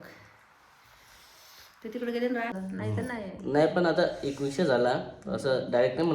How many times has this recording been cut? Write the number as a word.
one